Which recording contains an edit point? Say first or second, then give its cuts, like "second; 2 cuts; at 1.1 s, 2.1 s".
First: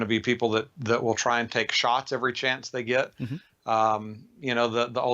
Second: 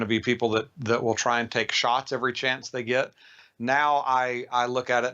second; 1 cut; at 3.4 s